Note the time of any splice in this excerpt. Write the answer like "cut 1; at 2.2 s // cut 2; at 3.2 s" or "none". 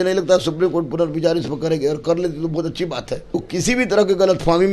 cut 1; at 3.4 s